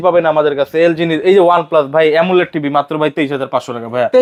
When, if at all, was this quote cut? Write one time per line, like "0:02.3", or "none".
none

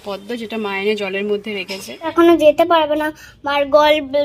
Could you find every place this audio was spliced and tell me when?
0:02.1

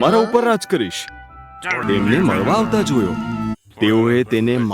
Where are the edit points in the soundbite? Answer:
0:01.8

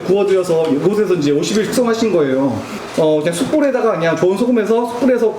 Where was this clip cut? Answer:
0:02.8

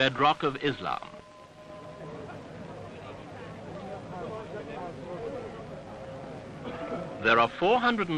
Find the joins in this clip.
0:07.2

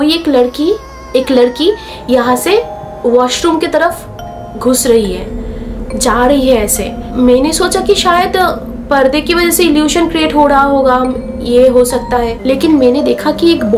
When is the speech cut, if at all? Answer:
0:12.3

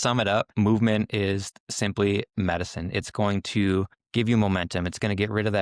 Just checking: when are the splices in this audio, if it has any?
0:04.0

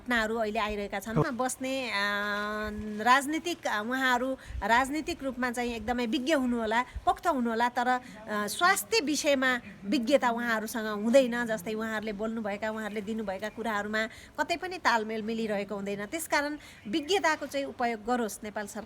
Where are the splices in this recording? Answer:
0:01.2

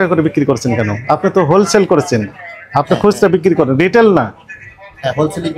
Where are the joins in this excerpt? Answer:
none

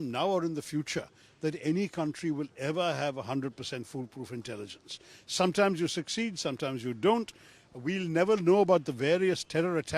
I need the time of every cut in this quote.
none

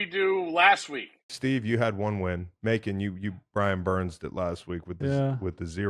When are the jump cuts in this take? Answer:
0:01.3

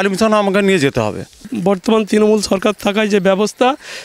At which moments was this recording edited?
0:01.5

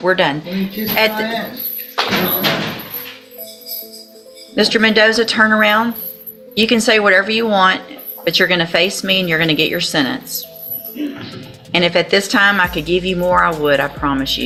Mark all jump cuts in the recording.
none

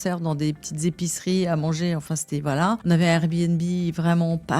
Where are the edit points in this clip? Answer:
0:02.8

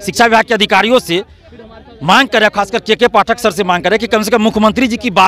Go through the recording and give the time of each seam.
none

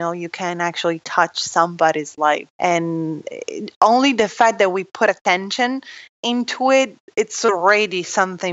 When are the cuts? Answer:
none

